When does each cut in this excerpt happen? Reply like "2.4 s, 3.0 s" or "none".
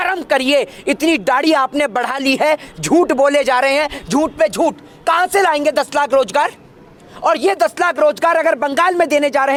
none

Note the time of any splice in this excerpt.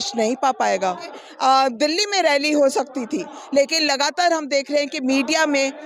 1.2 s

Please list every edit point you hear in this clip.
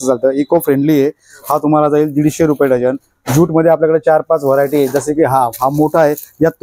none

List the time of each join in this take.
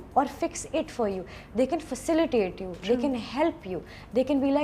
none

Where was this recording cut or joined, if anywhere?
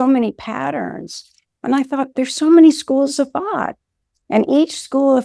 none

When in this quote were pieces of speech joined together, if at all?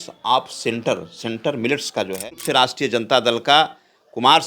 2.2 s

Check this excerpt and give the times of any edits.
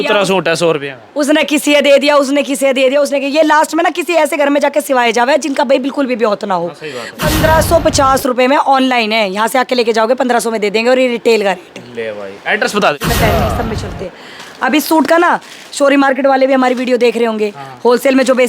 7.1 s, 13.0 s

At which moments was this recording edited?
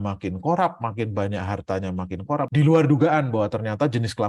2.5 s

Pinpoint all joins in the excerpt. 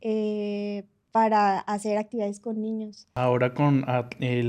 3.0 s

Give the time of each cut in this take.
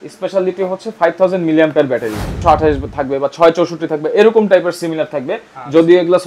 2.4 s

